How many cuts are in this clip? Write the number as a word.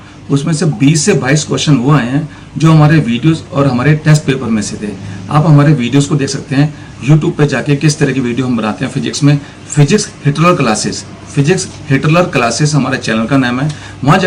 zero